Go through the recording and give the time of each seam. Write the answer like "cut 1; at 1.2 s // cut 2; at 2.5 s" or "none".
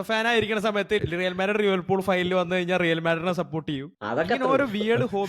cut 1; at 1.0 s

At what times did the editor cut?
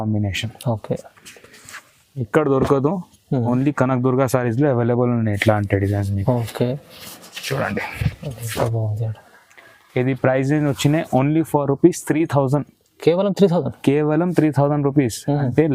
none

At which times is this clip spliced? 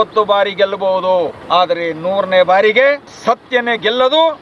cut 1; at 1.4 s // cut 2; at 3.1 s

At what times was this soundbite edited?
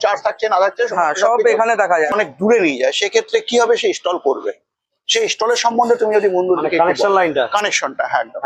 cut 1; at 2.1 s

